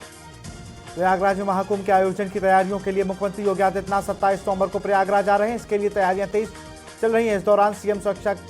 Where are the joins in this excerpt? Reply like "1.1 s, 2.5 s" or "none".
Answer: 0.9 s